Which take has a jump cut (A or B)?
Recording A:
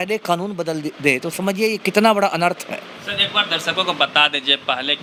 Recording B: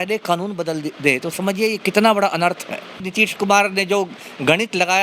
B